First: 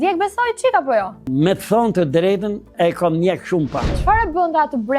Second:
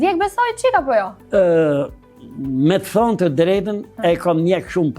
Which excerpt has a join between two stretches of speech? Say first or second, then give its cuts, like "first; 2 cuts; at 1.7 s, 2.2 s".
first; 2 cuts; at 1.2 s, 4.0 s